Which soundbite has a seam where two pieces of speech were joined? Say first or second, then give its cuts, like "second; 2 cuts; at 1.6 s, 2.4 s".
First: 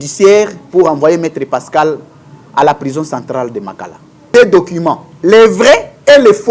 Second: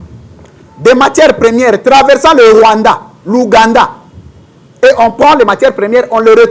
first; 1 cut; at 4.3 s